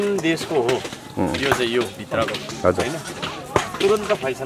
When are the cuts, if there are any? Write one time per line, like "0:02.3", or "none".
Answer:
none